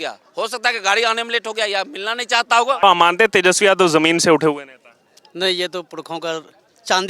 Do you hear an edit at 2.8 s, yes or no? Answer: yes